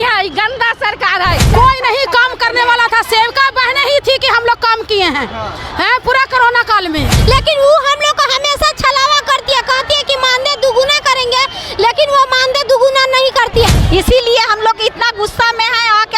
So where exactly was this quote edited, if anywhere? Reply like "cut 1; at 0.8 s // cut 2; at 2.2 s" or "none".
cut 1; at 1.4 s // cut 2; at 7.1 s // cut 3; at 13.8 s